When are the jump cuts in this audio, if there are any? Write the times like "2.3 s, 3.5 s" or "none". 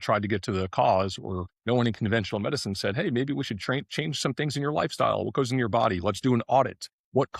1.5 s